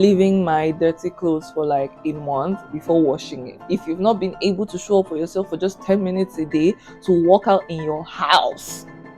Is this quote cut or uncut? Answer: cut